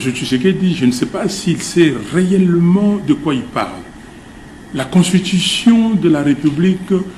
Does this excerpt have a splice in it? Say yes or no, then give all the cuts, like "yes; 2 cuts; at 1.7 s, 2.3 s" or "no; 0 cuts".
no; 0 cuts